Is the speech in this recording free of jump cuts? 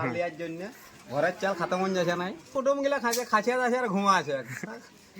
no; 1 cut; at 2.4 s

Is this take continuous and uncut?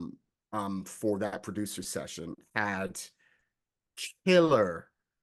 yes; 0 cuts

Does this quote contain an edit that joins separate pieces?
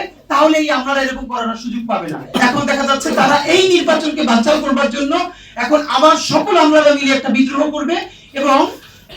yes; 1 cut; at 2.3 s

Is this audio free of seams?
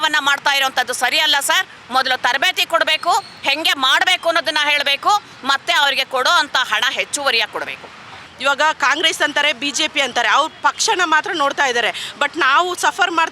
no; 1 cut; at 8.3 s

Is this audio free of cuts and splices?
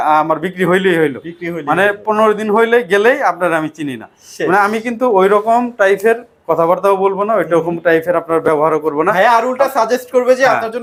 yes; 0 cuts

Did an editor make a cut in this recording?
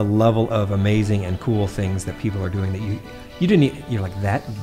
no; 0 cuts

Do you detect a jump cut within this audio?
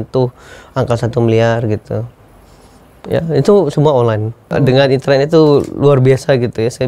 yes; 1 cut; at 4.5 s

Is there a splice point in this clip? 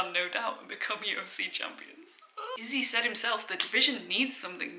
no; 0 cuts

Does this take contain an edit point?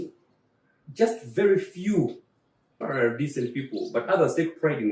no; 0 cuts

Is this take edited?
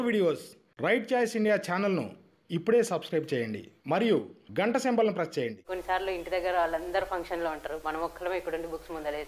yes; 1 cut; at 5.7 s

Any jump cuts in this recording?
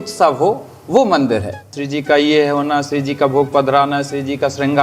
yes; 1 cut; at 1.7 s

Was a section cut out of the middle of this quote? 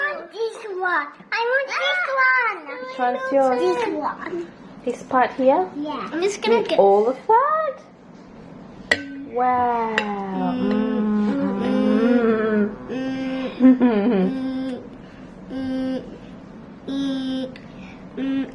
no; 0 cuts

